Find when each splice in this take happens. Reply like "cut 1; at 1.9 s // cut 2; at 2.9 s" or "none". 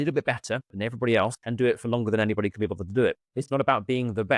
cut 1; at 1.4 s // cut 2; at 3.4 s